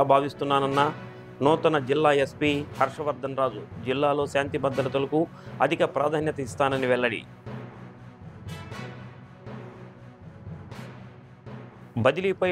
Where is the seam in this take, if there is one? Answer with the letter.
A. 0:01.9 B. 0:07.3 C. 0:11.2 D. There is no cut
D